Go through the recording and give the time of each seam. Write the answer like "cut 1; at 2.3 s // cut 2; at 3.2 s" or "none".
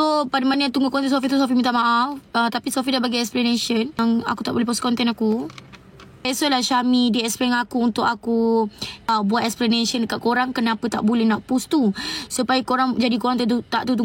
cut 1; at 4.0 s // cut 2; at 6.3 s // cut 3; at 9.1 s